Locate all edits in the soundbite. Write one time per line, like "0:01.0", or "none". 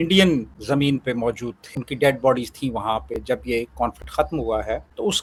none